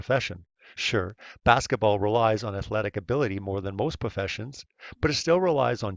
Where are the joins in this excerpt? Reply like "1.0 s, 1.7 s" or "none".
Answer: 4.1 s